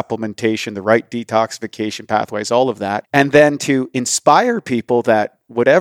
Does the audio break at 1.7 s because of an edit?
no; 1 cut; at 3.0 s

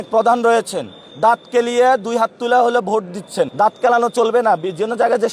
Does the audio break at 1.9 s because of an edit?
no; 1 cut; at 3.5 s

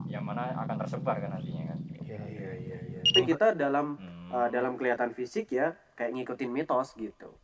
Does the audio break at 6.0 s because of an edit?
no; 1 cut; at 3.1 s

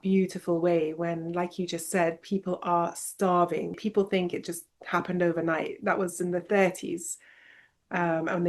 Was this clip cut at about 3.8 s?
yes; 1 cut; at 3.8 s

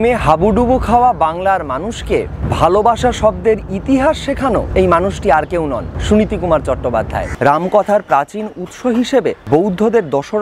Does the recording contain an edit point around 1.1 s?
no; 5 cuts; at 2.4 s, 4.7 s, 5.9 s, 7.2 s, 9.4 s

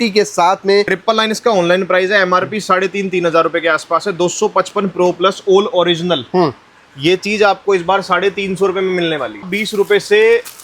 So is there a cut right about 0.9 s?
yes; 2 cuts; at 0.9 s, 9.5 s

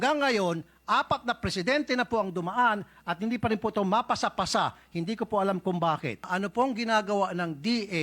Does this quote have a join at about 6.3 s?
yes; 1 cut; at 6.3 s

